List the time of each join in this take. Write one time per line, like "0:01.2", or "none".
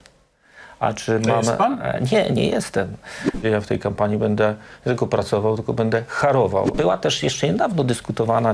0:03.4
0:06.7

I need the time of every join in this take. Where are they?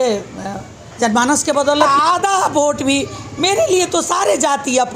0:01.9

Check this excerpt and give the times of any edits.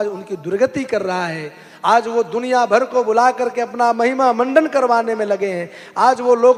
none

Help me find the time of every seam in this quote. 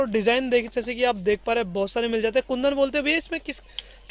none

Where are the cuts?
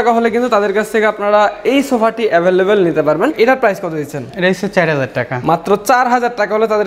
0:03.4

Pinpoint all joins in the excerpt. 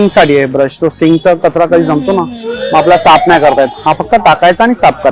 none

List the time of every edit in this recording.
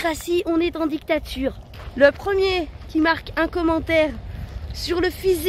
0:01.7

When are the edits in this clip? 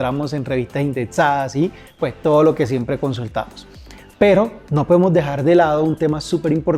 none

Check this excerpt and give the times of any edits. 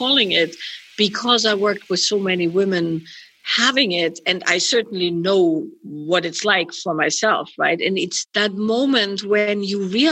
0:08.2

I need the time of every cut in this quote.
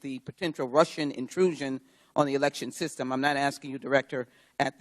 0:02.7

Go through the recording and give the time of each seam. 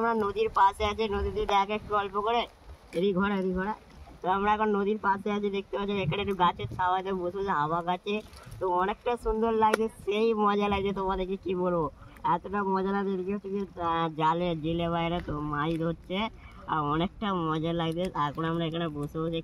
none

